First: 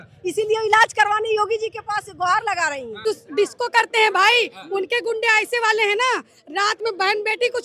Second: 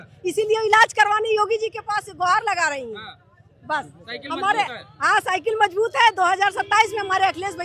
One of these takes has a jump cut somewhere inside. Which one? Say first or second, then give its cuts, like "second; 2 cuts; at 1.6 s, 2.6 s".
first; 1 cut; at 3.1 s